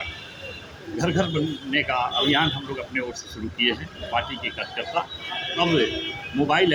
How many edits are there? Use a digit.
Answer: 0